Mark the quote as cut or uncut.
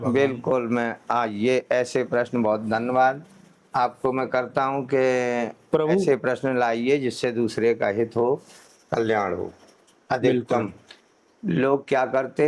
uncut